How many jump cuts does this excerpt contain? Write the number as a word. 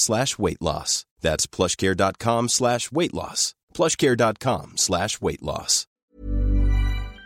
one